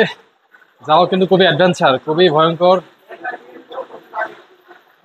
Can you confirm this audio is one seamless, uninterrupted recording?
yes; 0 cuts

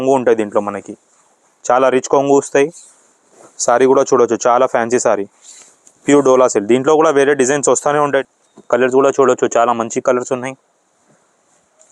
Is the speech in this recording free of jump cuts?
no; 1 cut; at 8.2 s

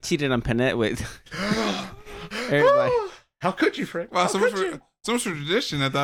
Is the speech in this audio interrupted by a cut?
no; 0 cuts

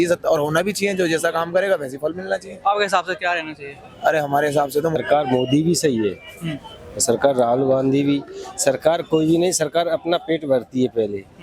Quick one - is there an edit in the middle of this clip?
yes; 1 cut; at 5.0 s

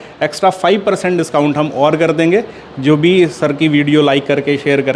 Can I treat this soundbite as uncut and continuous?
yes; 0 cuts

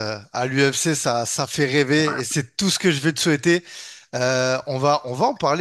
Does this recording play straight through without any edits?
yes; 0 cuts

